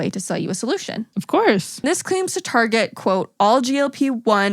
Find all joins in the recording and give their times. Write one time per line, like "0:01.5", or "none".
0:01.1
0:01.8